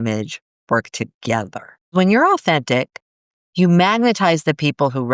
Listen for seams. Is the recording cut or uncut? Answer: cut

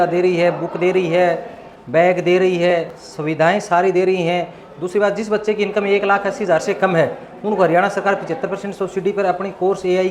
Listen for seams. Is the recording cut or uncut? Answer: uncut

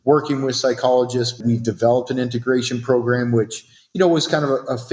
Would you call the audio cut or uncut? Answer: cut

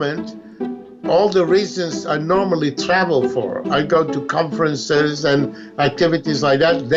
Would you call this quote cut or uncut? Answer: uncut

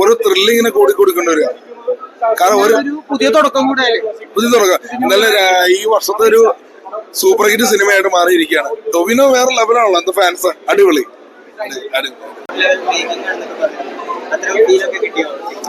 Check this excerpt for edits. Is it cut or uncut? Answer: uncut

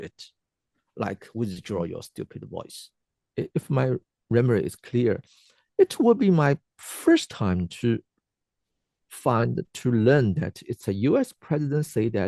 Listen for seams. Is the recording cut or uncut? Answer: cut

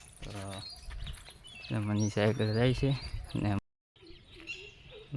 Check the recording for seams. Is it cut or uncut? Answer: cut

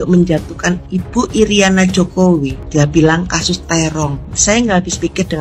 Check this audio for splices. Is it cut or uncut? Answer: cut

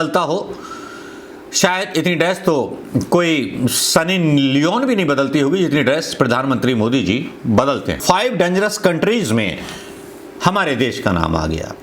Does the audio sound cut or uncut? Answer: cut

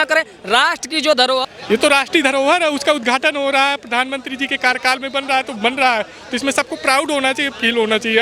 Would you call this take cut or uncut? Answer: cut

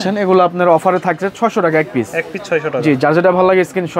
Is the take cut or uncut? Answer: uncut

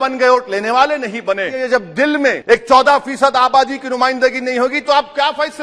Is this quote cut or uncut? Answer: cut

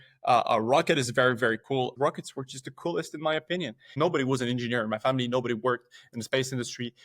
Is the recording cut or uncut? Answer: cut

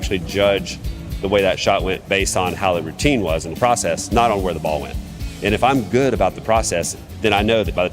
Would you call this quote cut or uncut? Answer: cut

